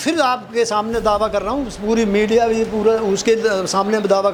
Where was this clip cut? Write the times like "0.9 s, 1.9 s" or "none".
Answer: none